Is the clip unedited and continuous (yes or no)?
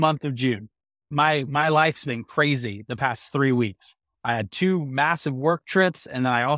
yes